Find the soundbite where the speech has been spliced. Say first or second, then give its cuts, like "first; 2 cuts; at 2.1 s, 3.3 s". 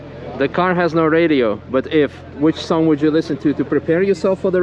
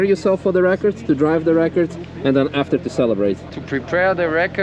second; 1 cut; at 3.6 s